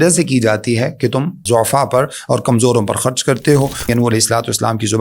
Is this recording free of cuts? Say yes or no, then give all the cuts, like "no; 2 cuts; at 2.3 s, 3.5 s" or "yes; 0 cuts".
no; 2 cuts; at 1.4 s, 3.9 s